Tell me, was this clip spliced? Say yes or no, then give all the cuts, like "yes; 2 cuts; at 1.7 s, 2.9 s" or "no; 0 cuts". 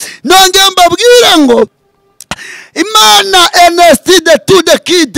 yes; 1 cut; at 1.8 s